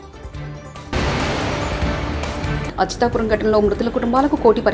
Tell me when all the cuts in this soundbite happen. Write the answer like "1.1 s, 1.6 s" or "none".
0.9 s, 2.7 s